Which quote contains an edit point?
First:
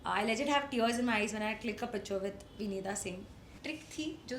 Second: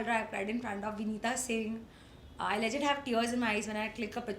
first; 1 cut; at 3.5 s

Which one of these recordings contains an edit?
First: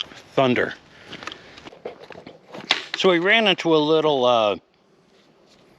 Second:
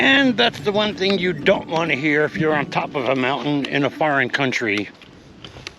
first; 1 cut; at 1.7 s

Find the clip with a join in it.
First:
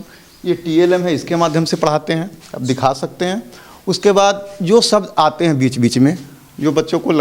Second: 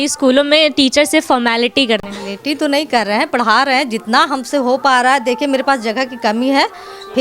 second; 1 cut; at 2.0 s

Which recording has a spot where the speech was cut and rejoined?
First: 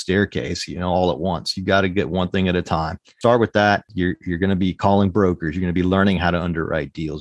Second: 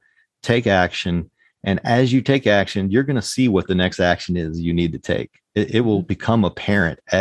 first; 2 cuts; at 3.1 s, 3.9 s

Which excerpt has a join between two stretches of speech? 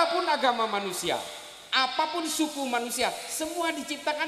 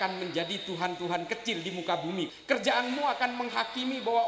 second; 1 cut; at 2.3 s

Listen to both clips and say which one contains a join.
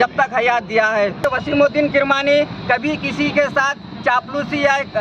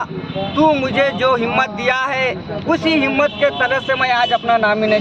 first; 1 cut; at 1.3 s

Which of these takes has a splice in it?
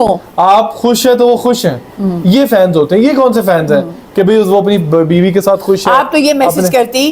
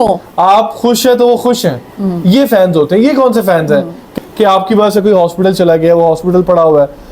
second; 1 cut; at 4.1 s

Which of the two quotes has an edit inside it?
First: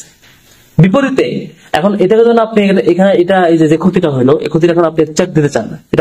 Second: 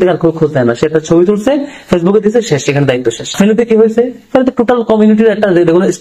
second; 1 cut; at 3.3 s

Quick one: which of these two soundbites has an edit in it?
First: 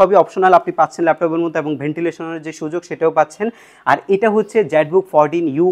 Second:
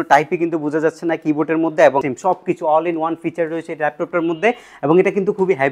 second; 1 cut; at 2.1 s

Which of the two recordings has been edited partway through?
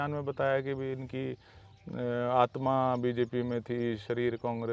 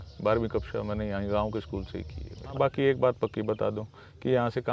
second; 1 cut; at 2.5 s

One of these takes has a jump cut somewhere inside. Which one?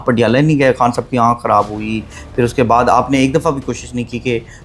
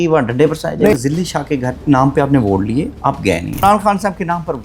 second; 2 cuts; at 0.9 s, 3.6 s

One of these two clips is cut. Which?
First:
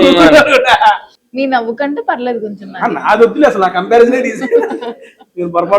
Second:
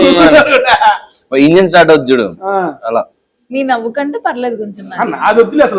first; 1 cut; at 1.1 s

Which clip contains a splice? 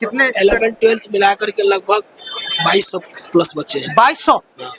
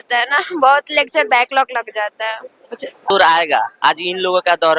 second; 1 cut; at 3.1 s

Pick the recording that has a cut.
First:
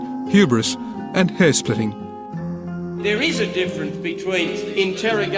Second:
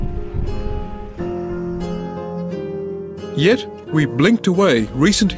first; 1 cut; at 1.1 s

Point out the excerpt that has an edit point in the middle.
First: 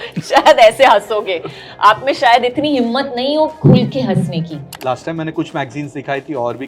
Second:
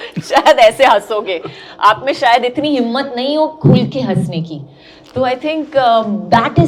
first; 1 cut; at 4.7 s

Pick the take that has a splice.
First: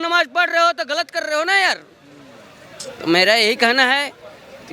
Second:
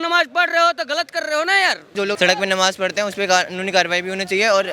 second; 1 cut; at 2.0 s

